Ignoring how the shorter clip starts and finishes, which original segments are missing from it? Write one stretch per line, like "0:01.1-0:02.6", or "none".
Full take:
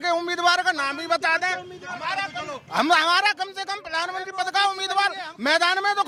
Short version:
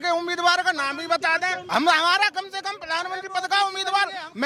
0:01.6-0:02.6